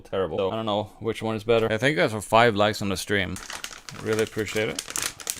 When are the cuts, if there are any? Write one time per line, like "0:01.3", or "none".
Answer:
0:01.7